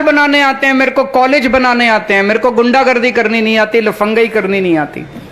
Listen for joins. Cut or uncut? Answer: uncut